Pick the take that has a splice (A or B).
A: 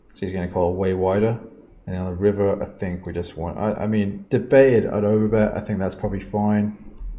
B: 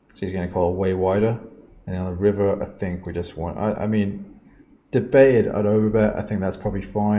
A